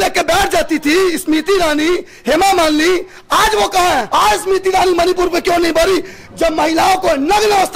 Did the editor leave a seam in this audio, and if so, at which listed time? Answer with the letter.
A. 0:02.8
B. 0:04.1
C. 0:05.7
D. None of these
B